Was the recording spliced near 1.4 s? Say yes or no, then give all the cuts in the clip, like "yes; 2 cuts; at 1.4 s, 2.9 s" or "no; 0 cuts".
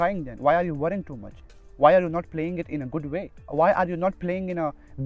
no; 1 cut; at 3.4 s